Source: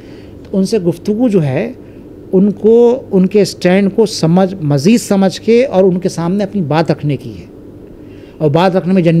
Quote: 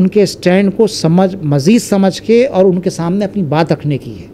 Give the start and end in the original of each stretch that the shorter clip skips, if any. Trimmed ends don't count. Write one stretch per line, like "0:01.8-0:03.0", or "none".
none